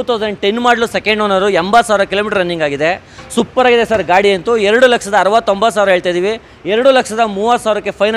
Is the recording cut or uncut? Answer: uncut